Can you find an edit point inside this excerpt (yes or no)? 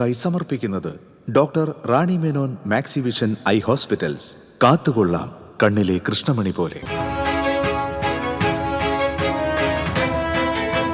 yes